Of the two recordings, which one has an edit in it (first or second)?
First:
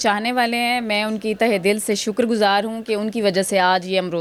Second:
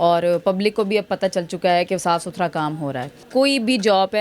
second